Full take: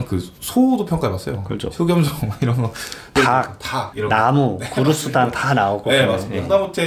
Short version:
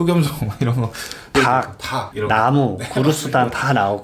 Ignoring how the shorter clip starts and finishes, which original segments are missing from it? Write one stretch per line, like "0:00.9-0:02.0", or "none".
none